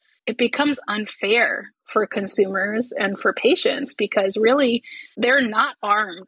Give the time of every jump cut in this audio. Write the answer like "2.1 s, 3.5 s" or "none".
none

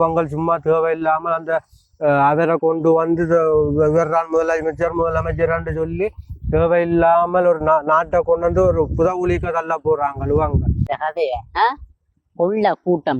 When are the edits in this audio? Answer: 10.8 s

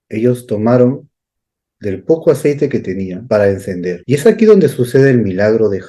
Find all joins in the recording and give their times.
3.2 s, 4.0 s

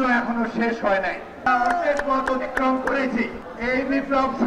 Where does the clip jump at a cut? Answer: 1.4 s, 3.4 s

